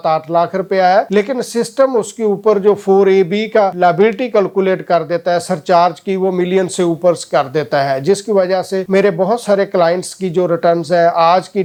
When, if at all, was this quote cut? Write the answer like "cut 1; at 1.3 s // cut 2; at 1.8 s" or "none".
none